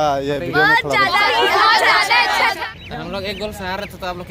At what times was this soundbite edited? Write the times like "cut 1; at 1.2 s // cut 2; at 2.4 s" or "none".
cut 1; at 2.6 s